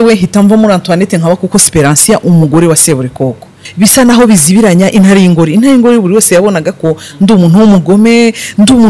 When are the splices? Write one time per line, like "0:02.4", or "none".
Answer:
0:03.6

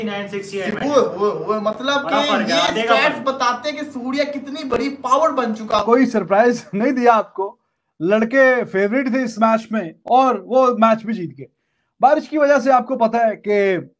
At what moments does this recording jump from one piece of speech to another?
0:05.8

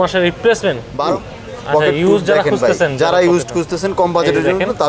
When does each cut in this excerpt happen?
0:01.0

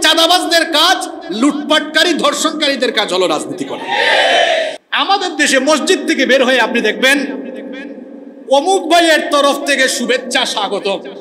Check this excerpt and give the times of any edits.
0:04.8

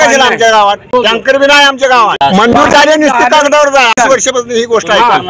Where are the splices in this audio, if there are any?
0:00.9
0:02.2
0:03.9

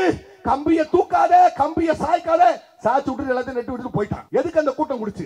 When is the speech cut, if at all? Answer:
0:04.2

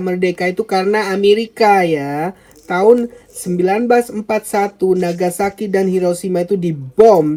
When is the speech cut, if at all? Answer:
none

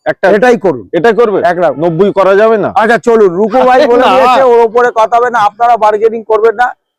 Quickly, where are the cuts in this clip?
none

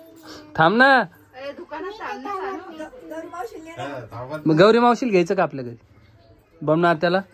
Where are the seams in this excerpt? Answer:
none

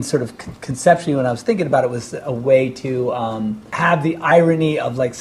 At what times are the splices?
0:03.6

